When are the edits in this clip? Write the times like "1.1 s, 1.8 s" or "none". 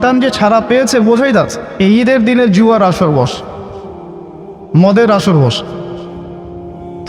1.7 s